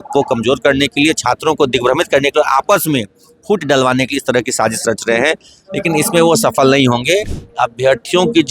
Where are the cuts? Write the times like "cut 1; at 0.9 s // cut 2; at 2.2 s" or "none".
cut 1; at 7.4 s